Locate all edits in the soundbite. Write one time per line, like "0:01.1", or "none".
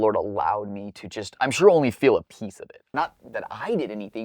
0:02.9